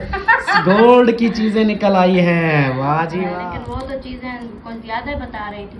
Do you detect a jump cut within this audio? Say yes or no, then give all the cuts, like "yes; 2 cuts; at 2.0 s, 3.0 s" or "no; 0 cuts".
yes; 1 cut; at 3.4 s